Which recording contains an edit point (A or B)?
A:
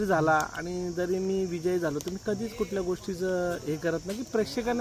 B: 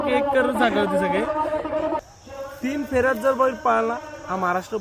B